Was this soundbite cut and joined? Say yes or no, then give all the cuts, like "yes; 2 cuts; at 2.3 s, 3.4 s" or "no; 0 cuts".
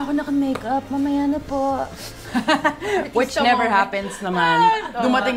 no; 0 cuts